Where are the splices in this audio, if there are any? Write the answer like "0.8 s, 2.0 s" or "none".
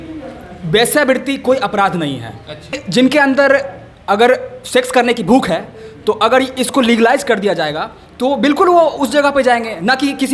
2.8 s